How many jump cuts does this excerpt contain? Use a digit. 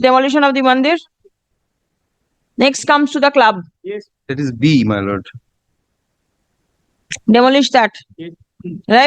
0